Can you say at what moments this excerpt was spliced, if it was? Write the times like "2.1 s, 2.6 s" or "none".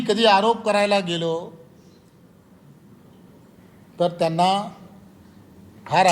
none